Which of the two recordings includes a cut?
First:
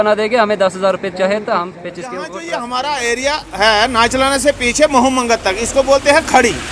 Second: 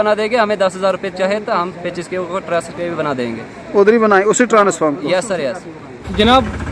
first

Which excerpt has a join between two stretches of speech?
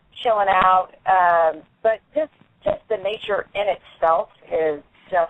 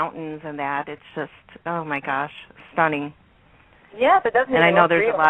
first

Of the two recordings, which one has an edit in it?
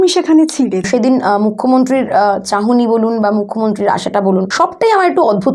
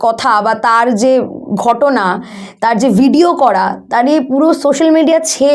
first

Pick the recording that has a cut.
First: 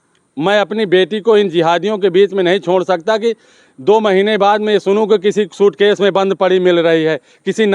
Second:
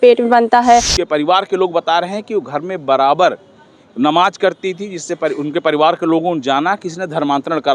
second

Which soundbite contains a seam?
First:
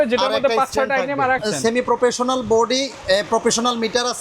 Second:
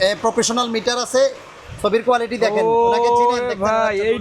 first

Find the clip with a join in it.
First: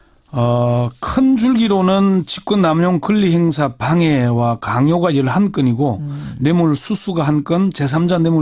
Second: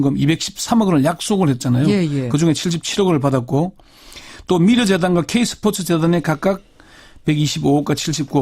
second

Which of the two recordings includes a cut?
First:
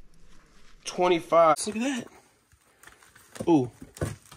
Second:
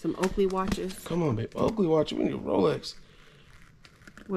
first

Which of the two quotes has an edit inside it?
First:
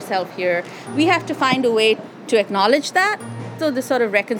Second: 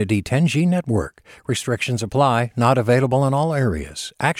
first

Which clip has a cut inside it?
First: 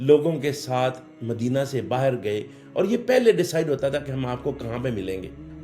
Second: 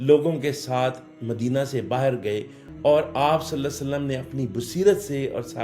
second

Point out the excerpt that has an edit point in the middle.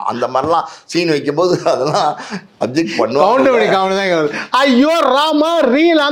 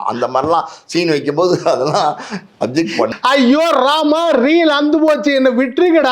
second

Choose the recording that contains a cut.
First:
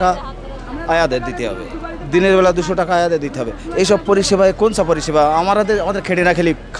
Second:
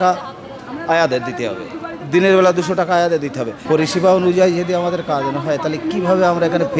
second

